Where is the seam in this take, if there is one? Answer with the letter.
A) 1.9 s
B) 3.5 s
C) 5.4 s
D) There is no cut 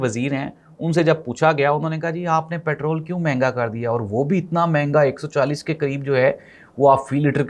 D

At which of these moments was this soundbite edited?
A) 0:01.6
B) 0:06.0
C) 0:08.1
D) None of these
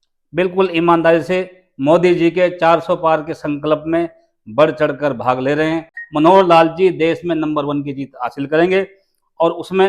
B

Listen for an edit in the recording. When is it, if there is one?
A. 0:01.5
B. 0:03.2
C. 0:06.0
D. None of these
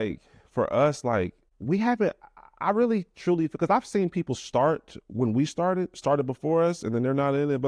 A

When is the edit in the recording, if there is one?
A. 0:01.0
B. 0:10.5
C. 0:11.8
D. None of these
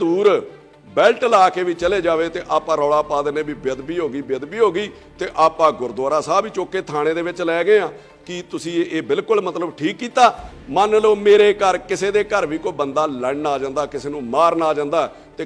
B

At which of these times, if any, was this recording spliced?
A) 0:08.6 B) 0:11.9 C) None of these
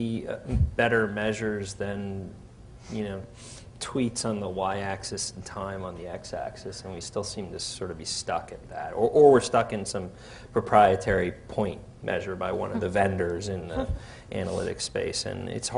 B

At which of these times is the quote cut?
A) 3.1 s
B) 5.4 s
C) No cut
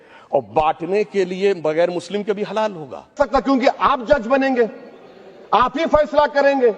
A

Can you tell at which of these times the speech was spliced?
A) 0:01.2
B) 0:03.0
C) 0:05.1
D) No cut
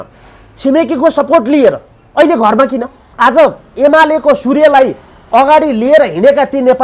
B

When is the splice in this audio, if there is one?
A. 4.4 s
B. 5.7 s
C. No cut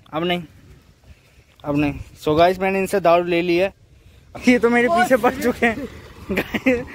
A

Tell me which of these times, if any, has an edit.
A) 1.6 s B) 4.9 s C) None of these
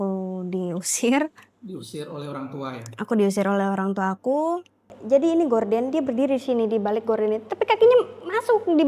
B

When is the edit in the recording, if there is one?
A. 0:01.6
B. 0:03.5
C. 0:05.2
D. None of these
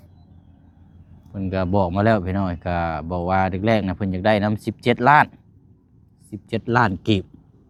D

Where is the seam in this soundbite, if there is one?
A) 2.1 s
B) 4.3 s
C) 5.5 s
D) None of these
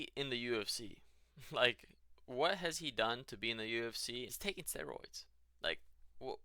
B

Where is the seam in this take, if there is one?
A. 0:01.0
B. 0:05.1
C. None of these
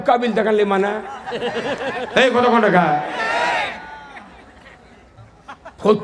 B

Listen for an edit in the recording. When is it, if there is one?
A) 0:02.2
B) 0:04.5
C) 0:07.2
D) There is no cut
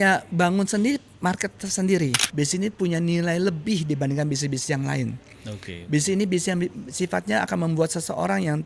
A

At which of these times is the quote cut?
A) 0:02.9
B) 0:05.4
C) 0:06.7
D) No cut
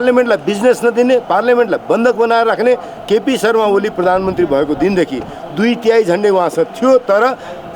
A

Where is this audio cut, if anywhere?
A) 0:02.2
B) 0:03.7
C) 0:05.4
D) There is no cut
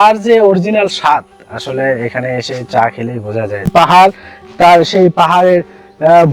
B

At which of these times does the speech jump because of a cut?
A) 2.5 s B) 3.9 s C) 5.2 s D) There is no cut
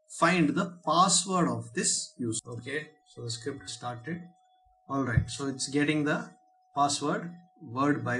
A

